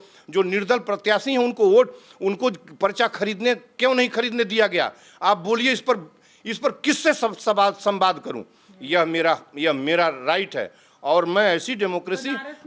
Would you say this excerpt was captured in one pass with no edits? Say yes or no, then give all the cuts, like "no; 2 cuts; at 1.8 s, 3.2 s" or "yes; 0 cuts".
yes; 0 cuts